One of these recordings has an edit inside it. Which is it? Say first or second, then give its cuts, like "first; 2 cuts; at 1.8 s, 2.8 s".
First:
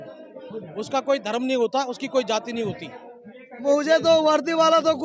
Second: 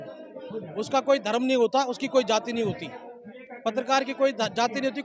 first; 1 cut; at 3.5 s